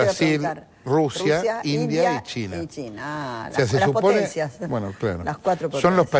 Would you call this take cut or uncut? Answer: uncut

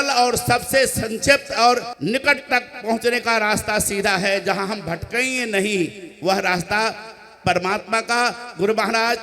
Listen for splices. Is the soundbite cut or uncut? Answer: cut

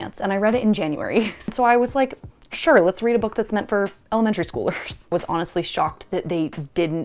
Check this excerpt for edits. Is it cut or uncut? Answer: cut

